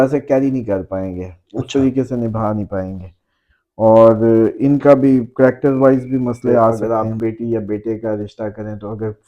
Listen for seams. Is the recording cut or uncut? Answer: cut